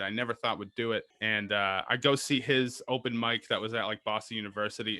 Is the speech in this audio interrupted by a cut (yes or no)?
yes